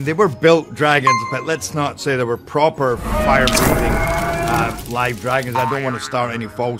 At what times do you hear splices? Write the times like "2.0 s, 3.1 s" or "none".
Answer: none

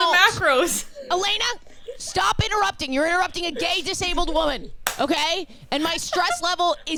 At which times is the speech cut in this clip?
none

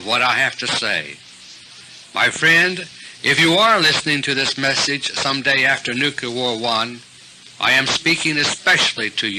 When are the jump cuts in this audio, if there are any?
none

